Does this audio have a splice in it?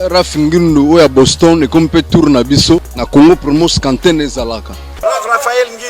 yes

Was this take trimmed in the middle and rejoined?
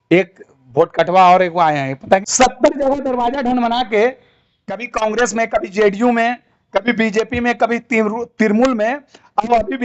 yes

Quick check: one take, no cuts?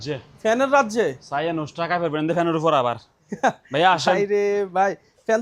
yes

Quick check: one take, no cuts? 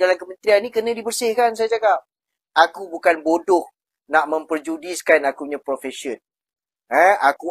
no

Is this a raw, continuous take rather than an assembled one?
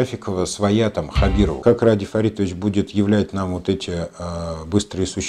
no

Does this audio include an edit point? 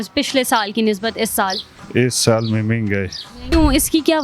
yes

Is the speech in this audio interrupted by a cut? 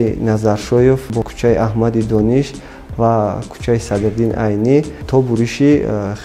yes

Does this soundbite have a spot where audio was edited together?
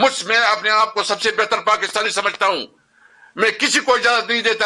no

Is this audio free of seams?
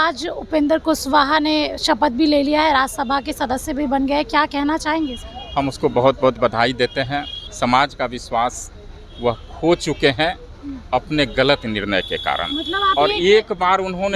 no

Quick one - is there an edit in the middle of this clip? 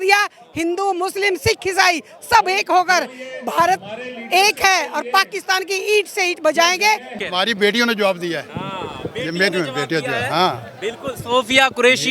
yes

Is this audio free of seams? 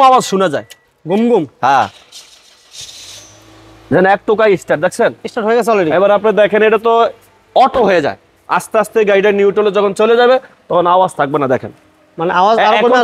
yes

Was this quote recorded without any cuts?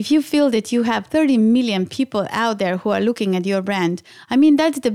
no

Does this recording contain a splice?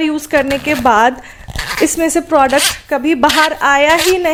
no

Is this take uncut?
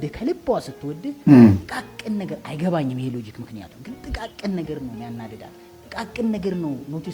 yes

